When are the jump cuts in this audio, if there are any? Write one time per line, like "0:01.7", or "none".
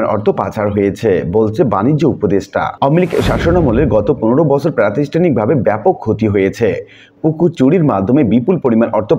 none

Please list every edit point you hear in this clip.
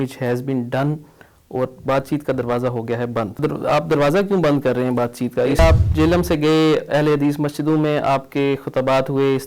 0:03.4
0:05.6

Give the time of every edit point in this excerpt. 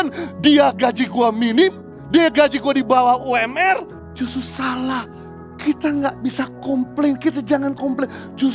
0:01.9
0:04.0

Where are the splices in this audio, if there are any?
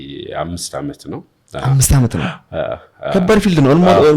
none

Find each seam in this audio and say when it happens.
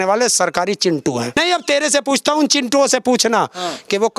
0:01.4

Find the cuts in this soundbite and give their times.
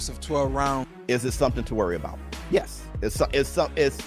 0:00.9

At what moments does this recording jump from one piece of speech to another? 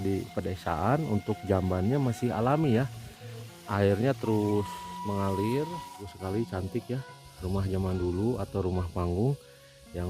0:06.1

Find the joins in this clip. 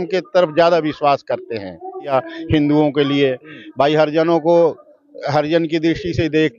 0:02.1

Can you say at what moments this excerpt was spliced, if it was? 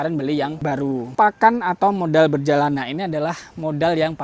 0:01.1

